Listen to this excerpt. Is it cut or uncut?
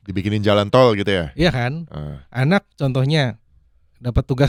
uncut